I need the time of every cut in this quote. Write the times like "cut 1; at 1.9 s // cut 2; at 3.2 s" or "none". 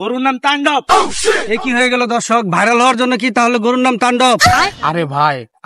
cut 1; at 4.5 s

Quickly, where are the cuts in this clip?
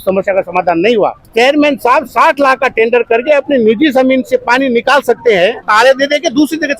cut 1; at 1.2 s // cut 2; at 5.7 s

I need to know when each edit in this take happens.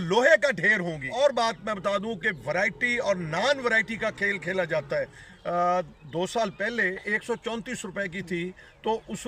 cut 1; at 1.1 s // cut 2; at 5.2 s

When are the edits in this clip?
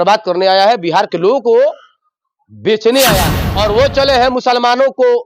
cut 1; at 3.4 s

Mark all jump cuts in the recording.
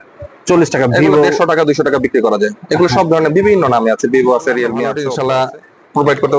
cut 1; at 5.0 s

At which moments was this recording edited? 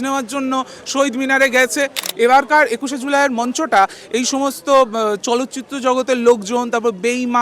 cut 1; at 2.0 s

